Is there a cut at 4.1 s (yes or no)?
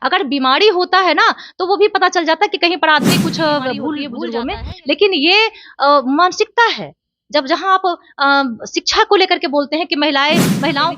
yes